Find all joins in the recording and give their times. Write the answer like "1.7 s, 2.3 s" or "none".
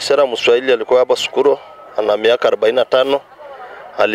none